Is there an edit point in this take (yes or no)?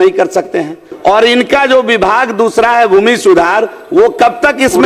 yes